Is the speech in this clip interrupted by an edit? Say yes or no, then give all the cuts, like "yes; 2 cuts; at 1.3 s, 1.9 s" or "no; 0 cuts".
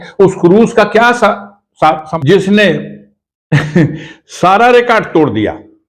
yes; 1 cut; at 2.1 s